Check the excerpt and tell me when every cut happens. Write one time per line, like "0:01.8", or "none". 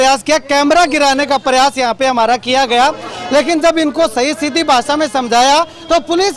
none